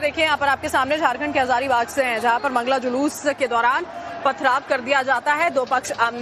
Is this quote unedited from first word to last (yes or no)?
yes